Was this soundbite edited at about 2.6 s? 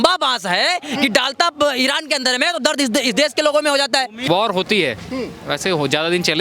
no; 1 cut; at 4.2 s

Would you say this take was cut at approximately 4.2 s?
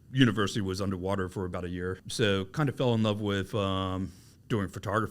no; 1 cut; at 2.0 s

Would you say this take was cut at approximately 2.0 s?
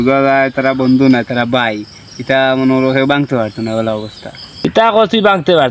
no; 1 cut; at 4.5 s

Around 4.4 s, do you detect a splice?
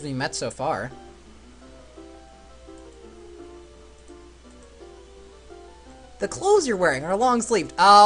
yes; 1 cut; at 4.4 s

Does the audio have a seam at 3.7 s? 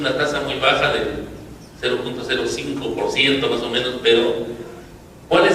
yes; 1 cut; at 3.7 s

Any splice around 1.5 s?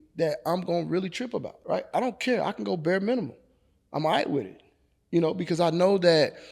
yes; 1 cut; at 1.5 s

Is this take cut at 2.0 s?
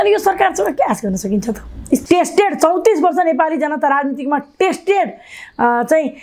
yes; 1 cut; at 2.0 s

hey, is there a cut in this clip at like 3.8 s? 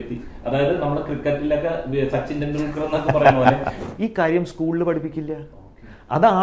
yes; 1 cut; at 3.8 s

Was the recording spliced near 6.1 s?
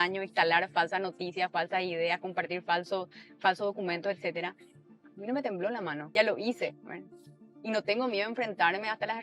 yes; 1 cut; at 6.1 s

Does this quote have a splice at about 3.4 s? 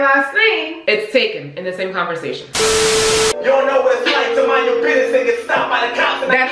yes; 2 cuts; at 2.4 s, 3.4 s

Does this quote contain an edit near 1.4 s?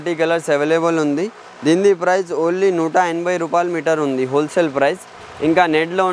no; 0 cuts

